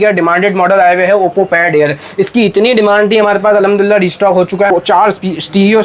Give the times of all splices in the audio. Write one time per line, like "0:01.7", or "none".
0:04.7